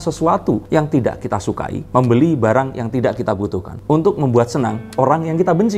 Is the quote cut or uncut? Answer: uncut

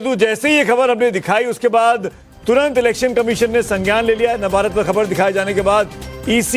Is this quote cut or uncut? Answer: cut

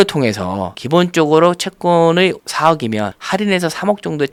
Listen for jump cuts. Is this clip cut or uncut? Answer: uncut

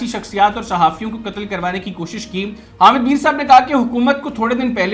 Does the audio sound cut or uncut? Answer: cut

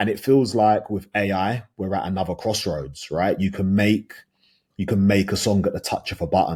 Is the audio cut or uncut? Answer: uncut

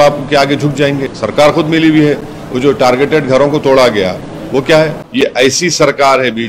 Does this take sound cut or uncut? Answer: cut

